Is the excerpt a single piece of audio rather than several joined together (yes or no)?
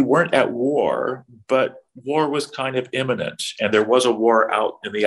yes